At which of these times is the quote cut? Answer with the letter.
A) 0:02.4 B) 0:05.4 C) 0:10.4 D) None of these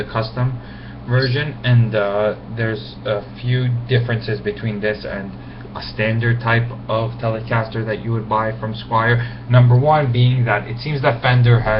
B